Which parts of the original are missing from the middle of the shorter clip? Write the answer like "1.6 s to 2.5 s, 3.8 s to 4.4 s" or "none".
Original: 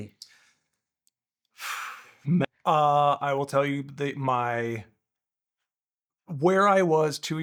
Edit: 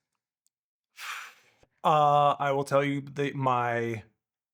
2.3 s to 2.5 s